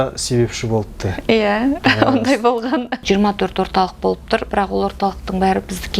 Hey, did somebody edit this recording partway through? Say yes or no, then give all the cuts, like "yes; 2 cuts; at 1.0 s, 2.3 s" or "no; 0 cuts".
yes; 1 cut; at 3.0 s